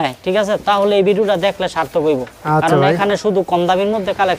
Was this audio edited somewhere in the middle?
no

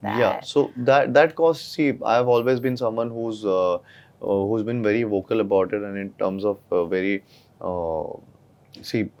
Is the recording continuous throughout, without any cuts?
yes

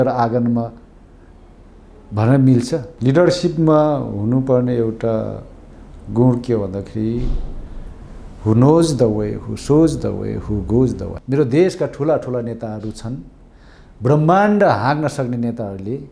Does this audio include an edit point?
yes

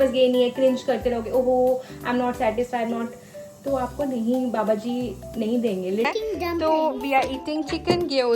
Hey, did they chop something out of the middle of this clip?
yes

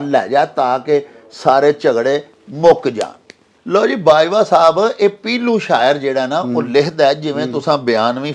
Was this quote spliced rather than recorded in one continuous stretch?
no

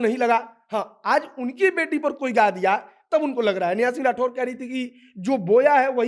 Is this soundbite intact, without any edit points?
yes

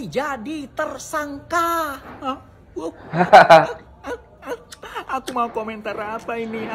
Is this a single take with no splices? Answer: yes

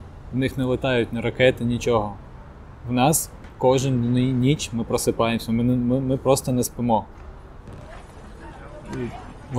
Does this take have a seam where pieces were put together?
no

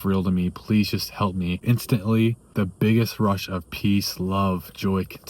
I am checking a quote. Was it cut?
yes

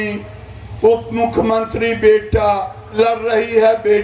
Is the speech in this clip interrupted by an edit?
yes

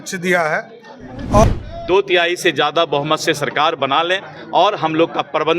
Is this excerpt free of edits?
no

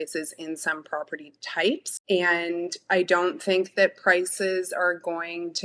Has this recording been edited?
yes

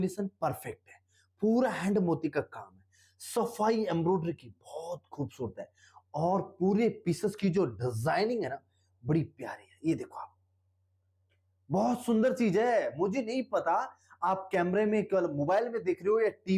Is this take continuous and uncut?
yes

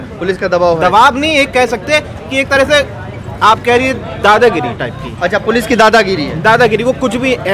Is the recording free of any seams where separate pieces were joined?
yes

